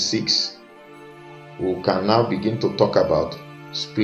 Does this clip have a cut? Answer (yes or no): no